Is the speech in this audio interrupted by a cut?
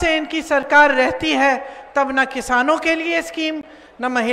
no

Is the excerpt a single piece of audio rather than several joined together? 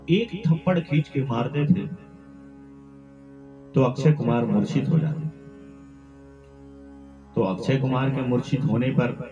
no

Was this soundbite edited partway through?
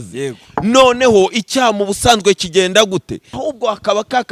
yes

